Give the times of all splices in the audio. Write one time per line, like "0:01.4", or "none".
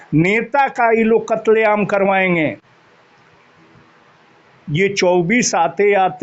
none